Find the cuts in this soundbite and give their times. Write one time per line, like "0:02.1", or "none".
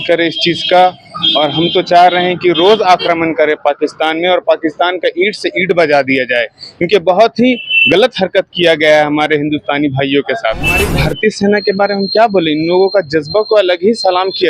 0:10.9